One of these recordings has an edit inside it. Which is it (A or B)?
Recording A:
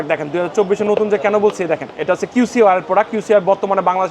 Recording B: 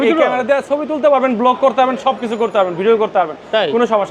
A